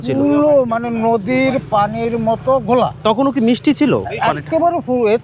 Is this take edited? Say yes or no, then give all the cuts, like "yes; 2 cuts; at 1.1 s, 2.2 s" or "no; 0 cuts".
no; 0 cuts